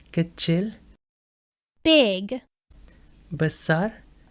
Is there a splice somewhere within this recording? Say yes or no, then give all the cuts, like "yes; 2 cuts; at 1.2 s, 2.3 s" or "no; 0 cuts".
yes; 1 cut; at 2.2 s